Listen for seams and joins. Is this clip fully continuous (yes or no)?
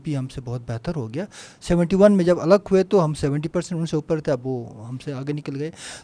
yes